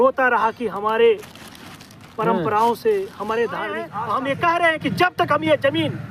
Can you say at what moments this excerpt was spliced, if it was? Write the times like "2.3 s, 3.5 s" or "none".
3.9 s